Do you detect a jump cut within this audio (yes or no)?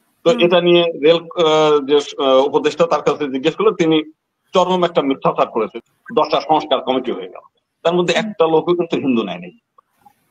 yes